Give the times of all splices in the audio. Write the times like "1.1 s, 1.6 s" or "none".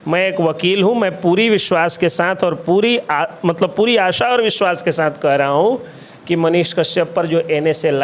none